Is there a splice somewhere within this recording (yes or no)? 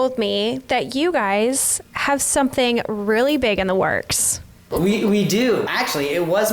yes